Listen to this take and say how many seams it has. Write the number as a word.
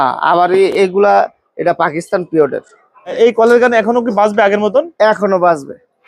one